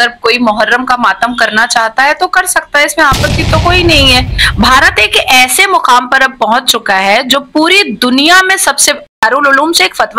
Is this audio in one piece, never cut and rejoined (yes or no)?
no